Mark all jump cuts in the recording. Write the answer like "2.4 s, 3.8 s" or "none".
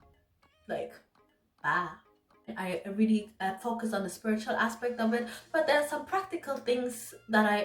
2.5 s